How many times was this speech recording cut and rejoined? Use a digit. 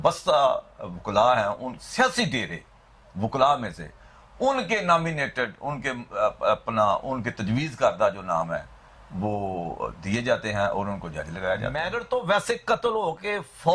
1